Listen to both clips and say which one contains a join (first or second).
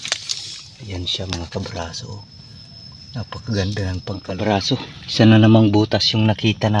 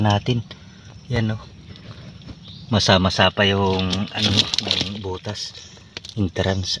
first